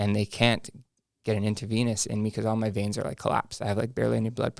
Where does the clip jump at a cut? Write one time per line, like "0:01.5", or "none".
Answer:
none